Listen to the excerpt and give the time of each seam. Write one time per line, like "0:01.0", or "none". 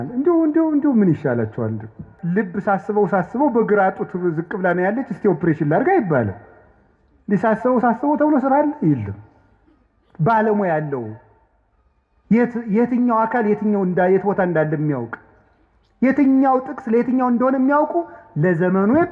0:02.1